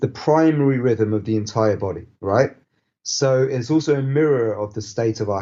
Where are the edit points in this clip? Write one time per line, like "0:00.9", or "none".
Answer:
none